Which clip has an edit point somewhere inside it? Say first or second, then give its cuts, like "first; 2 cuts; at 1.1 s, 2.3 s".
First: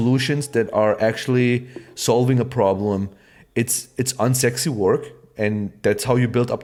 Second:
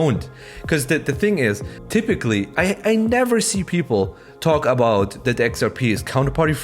second; 1 cut; at 1.7 s